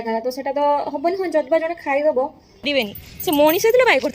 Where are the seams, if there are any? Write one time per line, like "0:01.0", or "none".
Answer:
0:02.7